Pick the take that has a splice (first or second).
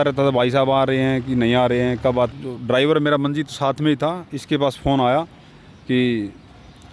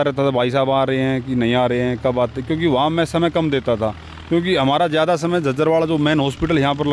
first